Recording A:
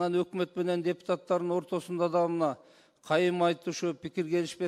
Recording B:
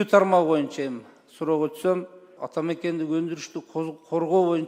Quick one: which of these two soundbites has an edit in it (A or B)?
B